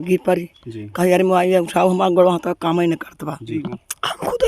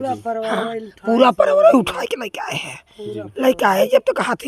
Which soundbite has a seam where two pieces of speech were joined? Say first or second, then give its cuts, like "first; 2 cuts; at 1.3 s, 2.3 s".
first; 1 cut; at 3.5 s